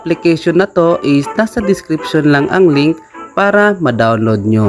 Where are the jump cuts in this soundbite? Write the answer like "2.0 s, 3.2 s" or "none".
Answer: none